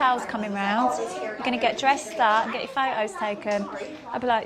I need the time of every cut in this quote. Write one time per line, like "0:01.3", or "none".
0:02.5